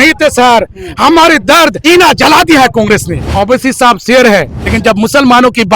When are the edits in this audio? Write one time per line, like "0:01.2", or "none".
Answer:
0:01.8
0:03.2
0:04.6

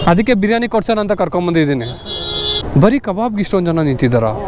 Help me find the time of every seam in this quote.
0:02.6

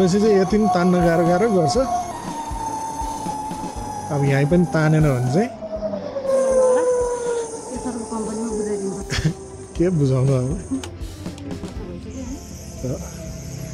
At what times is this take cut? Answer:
0:02.1

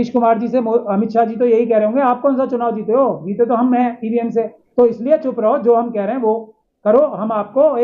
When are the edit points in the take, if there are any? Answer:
0:04.6

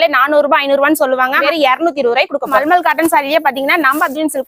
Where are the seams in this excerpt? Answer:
0:01.4
0:02.6

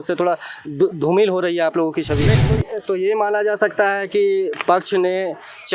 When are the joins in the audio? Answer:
0:02.4

